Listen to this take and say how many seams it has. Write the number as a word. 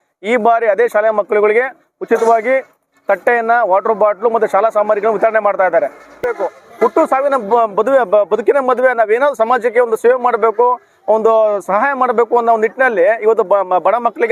one